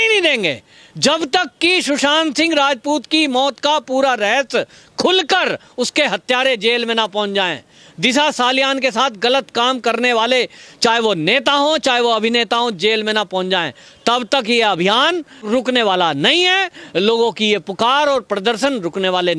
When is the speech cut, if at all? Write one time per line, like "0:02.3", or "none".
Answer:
none